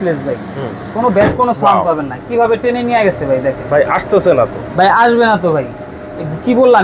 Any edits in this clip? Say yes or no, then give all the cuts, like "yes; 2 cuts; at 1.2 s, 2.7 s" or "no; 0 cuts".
no; 0 cuts